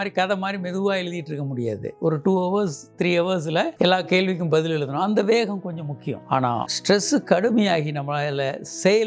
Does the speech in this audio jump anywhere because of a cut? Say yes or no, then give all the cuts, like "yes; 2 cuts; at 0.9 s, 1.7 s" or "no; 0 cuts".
no; 0 cuts